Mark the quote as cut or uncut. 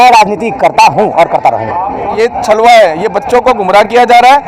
cut